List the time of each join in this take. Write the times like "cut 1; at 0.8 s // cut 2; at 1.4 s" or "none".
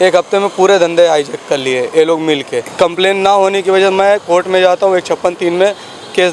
cut 1; at 2.7 s